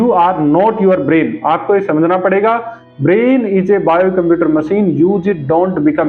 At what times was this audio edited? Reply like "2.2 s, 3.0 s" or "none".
none